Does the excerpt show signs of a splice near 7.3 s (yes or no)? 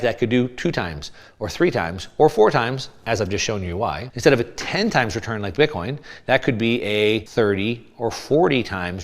yes